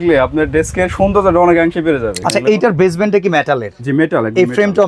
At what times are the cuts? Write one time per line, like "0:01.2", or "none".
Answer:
0:02.2